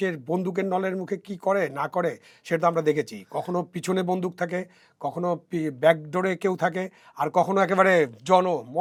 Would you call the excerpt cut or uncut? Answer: uncut